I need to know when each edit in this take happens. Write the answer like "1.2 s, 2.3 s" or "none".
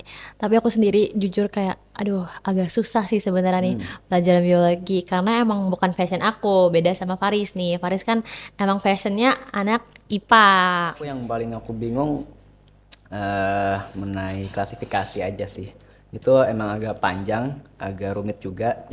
11.2 s